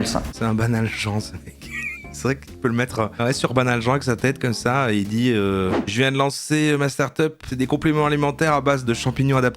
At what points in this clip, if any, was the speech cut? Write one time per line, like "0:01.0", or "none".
0:07.4